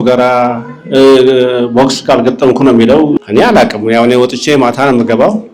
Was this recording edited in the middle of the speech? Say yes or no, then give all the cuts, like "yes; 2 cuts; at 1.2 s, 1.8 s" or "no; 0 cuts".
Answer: yes; 1 cut; at 3.2 s